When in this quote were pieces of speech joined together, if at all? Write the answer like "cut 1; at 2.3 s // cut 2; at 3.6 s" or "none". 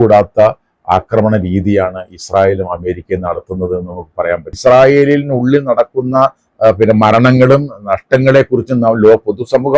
cut 1; at 4.6 s